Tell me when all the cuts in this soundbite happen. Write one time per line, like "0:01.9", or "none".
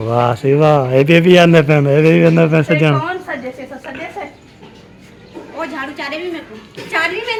none